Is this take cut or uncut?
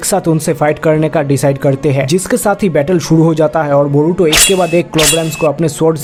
uncut